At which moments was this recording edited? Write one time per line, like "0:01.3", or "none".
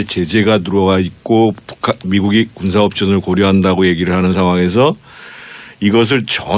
none